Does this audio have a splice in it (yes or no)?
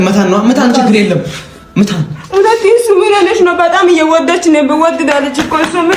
no